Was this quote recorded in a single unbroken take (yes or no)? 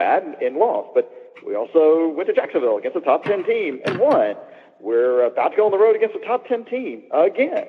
yes